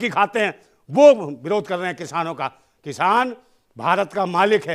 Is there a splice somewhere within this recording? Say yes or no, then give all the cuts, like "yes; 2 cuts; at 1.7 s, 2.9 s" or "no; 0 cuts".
no; 0 cuts